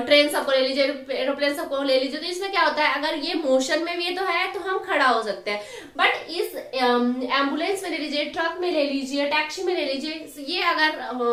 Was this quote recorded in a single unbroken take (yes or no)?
yes